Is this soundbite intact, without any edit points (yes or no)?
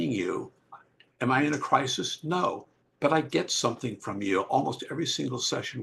yes